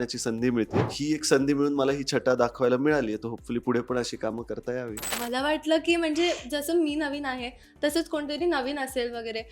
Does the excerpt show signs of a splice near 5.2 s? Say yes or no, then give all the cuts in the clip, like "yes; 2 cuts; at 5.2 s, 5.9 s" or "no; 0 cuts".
yes; 2 cuts; at 1.0 s, 5.2 s